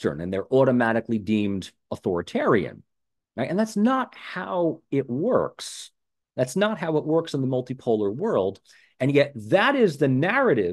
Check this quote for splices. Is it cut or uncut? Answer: uncut